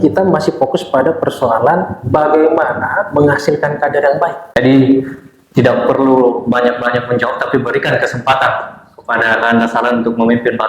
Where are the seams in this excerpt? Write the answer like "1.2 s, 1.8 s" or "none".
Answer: 4.5 s